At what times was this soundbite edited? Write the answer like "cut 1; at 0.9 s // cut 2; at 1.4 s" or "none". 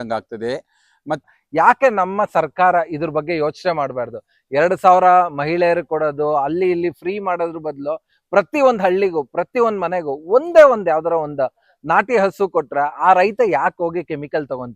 cut 1; at 1.2 s